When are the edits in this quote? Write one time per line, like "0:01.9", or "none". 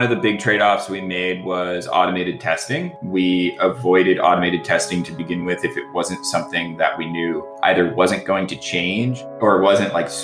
0:07.5
0:09.2